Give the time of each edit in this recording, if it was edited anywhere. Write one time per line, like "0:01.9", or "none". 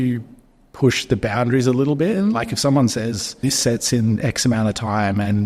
0:03.4